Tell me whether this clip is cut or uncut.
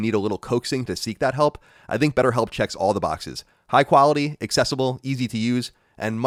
uncut